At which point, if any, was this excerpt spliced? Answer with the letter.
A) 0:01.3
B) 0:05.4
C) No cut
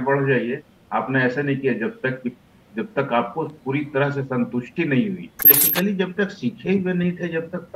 B